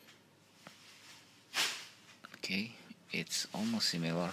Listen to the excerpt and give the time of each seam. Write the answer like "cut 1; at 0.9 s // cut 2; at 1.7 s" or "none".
cut 1; at 1.1 s

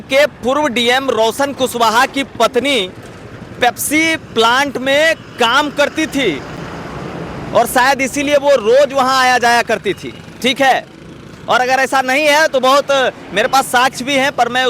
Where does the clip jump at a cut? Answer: none

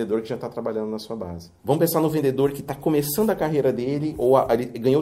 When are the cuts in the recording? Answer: cut 1; at 1.4 s

